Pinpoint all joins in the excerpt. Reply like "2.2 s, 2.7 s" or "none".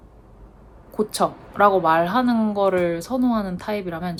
none